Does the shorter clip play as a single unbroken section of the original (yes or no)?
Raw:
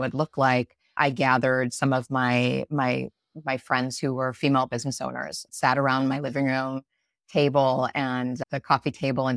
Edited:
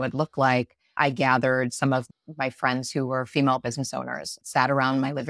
no